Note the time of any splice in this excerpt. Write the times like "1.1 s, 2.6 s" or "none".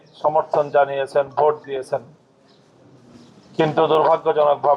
none